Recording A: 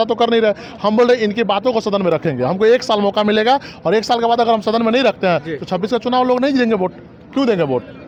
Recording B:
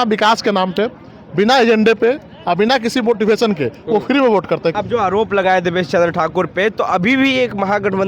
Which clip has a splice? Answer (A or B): B